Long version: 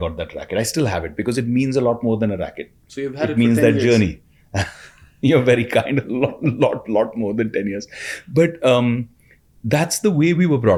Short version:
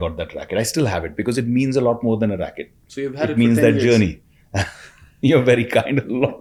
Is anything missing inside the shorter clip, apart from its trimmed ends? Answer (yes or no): no